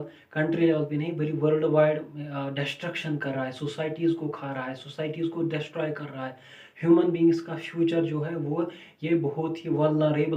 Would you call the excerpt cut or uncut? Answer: uncut